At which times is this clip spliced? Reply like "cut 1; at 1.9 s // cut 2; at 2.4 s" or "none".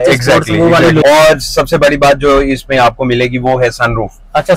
cut 1; at 1.0 s